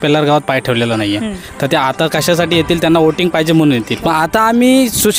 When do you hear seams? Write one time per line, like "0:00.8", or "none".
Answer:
0:03.9